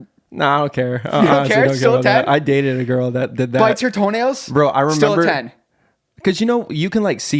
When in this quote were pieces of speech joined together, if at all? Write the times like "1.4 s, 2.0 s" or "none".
none